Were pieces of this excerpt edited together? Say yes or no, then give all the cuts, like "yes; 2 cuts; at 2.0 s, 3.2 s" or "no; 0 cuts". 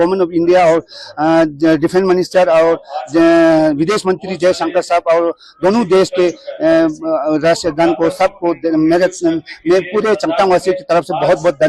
no; 0 cuts